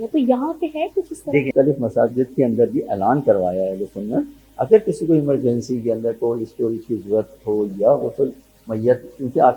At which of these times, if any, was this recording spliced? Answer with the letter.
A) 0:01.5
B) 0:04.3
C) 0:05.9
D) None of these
A